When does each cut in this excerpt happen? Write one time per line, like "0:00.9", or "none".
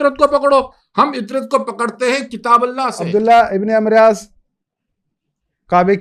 0:03.0